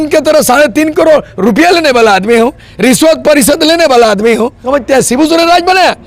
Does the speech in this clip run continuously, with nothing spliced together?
no; 1 cut; at 4.6 s

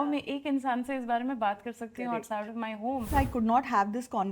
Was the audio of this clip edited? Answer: yes; 1 cut; at 3.1 s

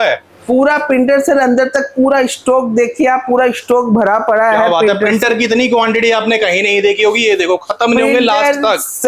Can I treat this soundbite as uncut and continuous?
yes; 0 cuts

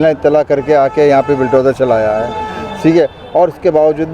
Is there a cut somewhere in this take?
no; 0 cuts

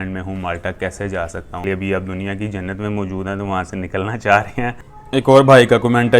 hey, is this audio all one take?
no; 2 cuts; at 1.6 s, 4.9 s

